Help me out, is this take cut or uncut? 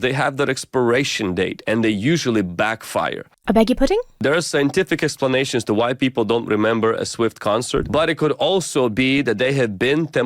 cut